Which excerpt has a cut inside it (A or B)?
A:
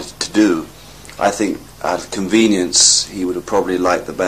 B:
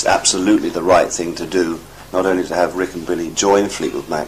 A